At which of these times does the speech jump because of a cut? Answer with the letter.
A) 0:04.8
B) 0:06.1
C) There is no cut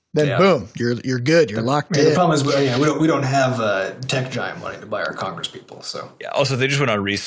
C